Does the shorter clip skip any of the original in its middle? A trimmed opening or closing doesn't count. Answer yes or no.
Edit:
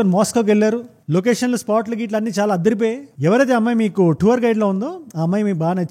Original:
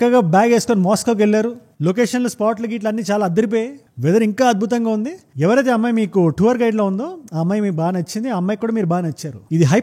yes